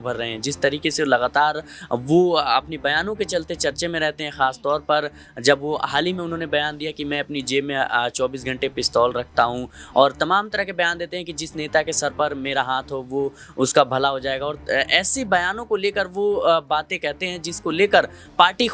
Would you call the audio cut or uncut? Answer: uncut